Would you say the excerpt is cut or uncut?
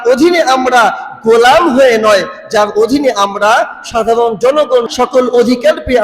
cut